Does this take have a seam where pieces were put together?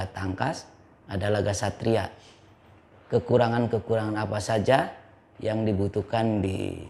no; 0 cuts

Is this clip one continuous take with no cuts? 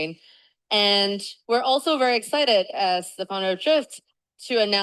yes; 0 cuts

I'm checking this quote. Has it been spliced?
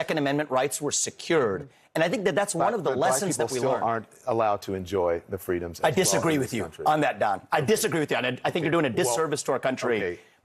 no; 0 cuts

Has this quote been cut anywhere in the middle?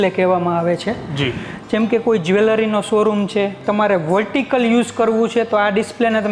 yes; 1 cut; at 3.6 s

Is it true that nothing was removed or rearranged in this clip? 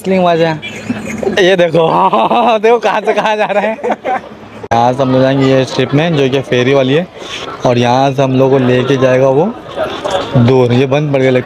no; 1 cut; at 4.7 s

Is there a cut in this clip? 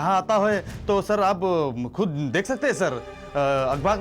no; 0 cuts

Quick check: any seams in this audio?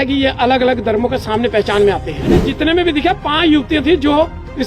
yes; 1 cut; at 2.5 s

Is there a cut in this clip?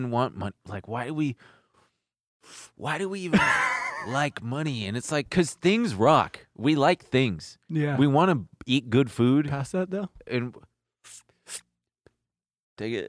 yes; 1 cut; at 3.8 s

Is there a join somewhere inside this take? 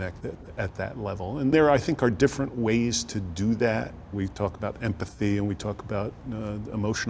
yes; 2 cuts; at 1.5 s, 4.1 s

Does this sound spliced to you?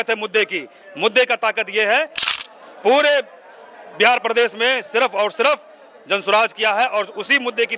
yes; 1 cut; at 2.3 s

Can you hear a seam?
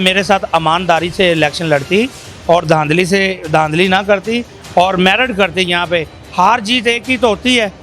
no; 0 cuts

